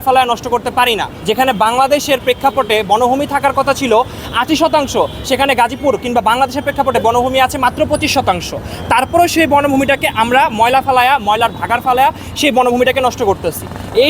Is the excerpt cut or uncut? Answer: uncut